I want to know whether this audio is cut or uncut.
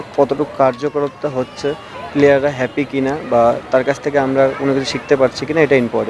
uncut